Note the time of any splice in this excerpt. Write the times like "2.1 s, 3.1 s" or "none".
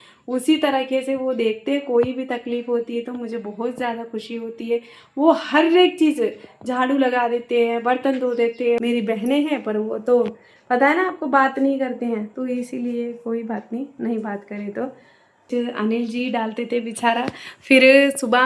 8.8 s, 15.4 s